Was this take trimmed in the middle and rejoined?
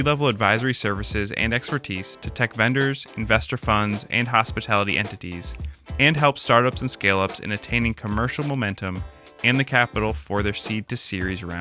no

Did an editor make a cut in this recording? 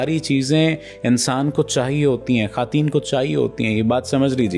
no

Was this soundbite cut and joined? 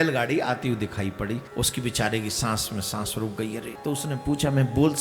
yes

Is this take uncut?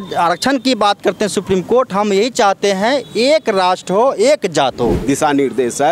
no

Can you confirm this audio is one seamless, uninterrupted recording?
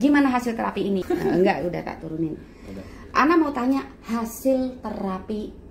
no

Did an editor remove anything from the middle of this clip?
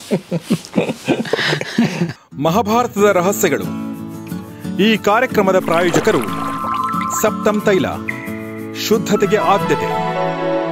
yes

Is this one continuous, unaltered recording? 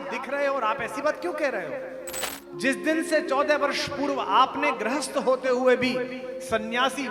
no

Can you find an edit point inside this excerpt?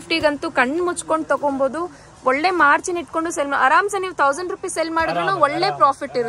no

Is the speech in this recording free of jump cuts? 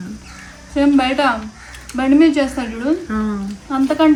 yes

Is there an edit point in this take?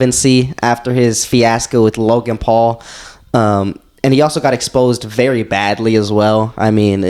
no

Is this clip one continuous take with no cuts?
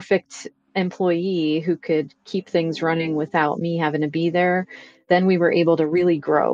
yes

